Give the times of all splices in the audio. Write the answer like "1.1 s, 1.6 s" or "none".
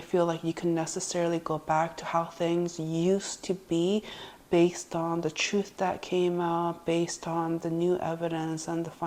none

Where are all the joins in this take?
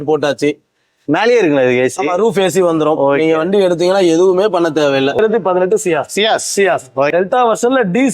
5.2 s, 7.1 s

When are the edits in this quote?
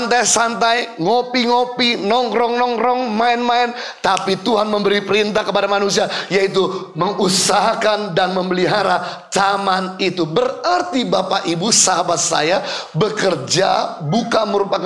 none

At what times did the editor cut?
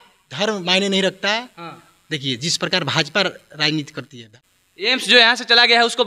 4.2 s

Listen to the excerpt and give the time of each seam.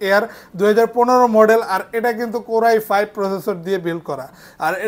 none

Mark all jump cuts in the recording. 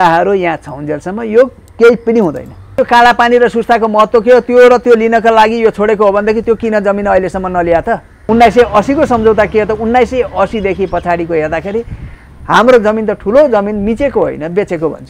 2.7 s, 8.2 s

